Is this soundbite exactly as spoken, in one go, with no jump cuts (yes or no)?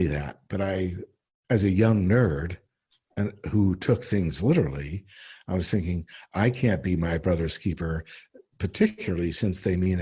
yes